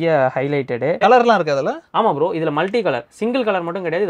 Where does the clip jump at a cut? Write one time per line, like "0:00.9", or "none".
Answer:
0:01.0